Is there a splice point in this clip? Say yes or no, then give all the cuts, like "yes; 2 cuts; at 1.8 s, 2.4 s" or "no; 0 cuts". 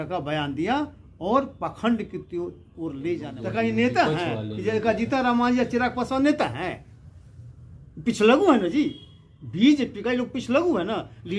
yes; 1 cut; at 3.4 s